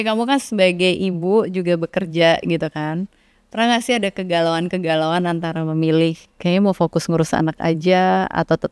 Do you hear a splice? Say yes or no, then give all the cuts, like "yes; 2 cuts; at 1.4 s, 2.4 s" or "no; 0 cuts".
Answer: no; 0 cuts